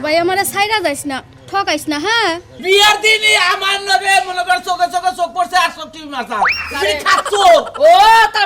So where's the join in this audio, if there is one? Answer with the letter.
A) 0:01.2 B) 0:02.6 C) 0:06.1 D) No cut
B